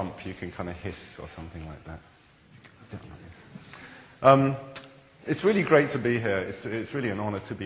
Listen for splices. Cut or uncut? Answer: uncut